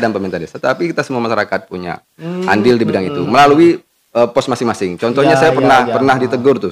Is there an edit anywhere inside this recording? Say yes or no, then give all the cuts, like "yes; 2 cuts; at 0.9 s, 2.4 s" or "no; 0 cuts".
no; 0 cuts